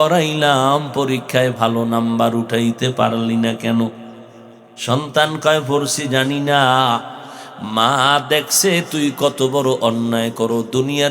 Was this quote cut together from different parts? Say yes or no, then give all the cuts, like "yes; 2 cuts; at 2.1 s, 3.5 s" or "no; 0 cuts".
no; 0 cuts